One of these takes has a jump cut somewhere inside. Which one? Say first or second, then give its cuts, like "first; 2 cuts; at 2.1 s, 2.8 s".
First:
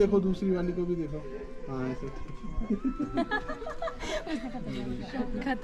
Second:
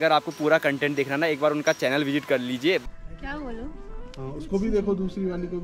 second; 1 cut; at 2.8 s